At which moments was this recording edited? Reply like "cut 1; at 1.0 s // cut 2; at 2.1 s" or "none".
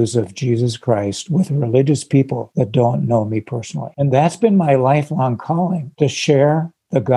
cut 1; at 2.4 s // cut 2; at 3.9 s // cut 3; at 5.9 s